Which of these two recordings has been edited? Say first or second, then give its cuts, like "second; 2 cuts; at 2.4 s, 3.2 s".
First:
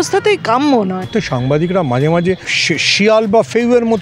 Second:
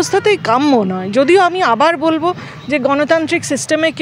first; 2 cuts; at 1.0 s, 2.5 s